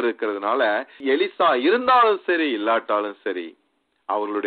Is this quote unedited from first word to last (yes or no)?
yes